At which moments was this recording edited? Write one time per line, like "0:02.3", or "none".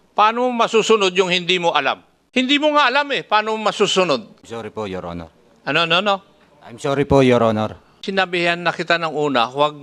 0:02.1
0:04.4
0:07.9